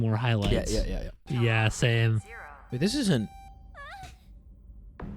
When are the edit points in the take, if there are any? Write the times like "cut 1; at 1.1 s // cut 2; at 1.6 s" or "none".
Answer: cut 1; at 1.1 s